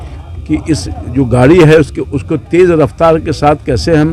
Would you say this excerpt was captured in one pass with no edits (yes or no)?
yes